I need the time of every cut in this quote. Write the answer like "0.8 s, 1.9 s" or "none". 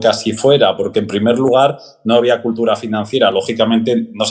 none